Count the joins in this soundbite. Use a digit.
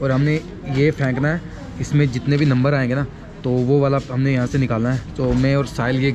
0